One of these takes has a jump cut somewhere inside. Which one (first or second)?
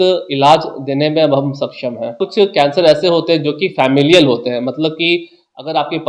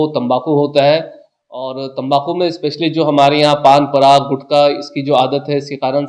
first